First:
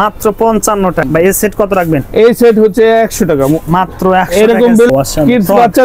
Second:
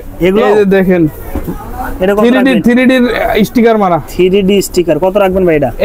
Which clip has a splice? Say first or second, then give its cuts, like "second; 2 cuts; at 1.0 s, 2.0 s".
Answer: first; 2 cuts; at 1.1 s, 4.9 s